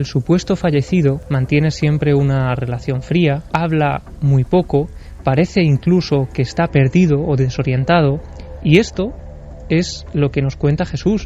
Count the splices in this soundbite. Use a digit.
2